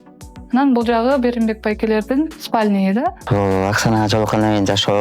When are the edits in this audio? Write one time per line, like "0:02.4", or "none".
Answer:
0:03.2